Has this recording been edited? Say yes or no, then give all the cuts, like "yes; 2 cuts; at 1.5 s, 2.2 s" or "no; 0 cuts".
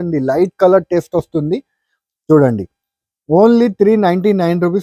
no; 0 cuts